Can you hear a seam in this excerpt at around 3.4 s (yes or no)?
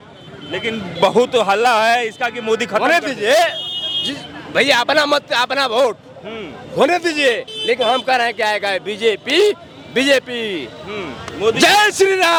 no